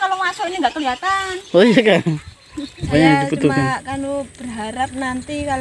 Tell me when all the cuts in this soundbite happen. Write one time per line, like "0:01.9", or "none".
0:02.8